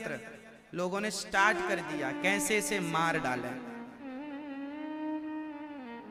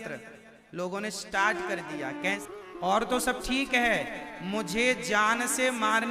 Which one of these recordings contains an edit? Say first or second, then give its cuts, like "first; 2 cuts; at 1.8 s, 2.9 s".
second; 1 cut; at 2.4 s